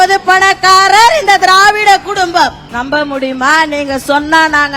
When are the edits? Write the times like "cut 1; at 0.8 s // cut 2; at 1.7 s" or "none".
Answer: cut 1; at 2.6 s